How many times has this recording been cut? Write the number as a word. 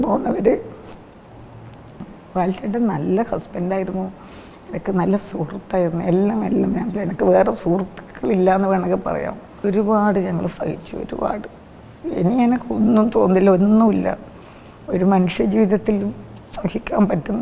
two